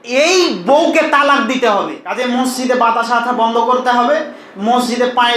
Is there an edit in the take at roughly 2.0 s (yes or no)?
yes